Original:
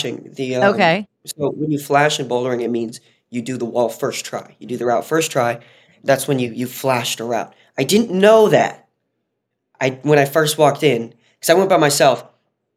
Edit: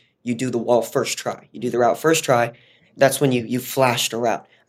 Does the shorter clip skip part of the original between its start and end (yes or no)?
no